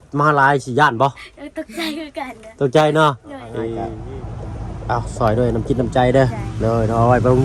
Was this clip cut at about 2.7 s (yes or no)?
no